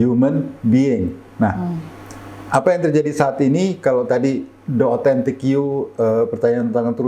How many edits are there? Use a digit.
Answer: 0